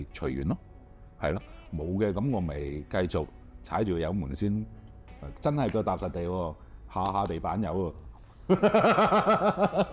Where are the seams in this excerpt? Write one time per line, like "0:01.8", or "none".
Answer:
none